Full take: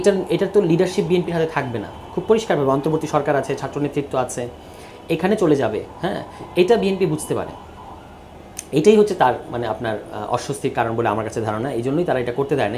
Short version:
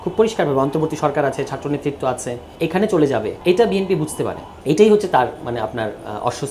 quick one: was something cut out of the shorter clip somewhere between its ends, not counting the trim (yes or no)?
yes